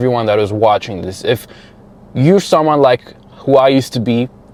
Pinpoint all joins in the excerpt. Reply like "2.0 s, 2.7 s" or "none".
none